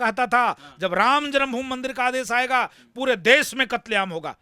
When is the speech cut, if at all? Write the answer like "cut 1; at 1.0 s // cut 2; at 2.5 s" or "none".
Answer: none